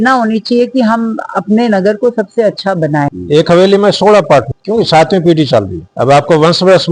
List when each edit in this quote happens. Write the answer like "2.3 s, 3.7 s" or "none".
3.1 s, 4.5 s, 5.8 s